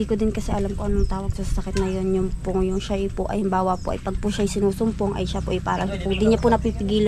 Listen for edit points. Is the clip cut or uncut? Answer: uncut